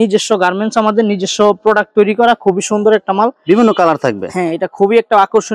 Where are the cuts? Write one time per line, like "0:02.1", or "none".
none